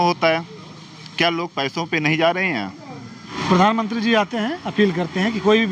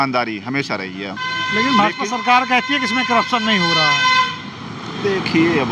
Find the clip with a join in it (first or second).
first